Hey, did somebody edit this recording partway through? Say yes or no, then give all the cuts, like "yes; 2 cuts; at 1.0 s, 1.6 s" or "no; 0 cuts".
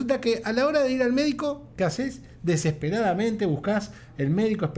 no; 0 cuts